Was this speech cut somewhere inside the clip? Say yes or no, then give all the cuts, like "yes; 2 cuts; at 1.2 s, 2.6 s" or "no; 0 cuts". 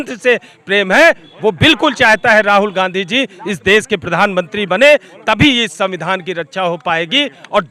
no; 0 cuts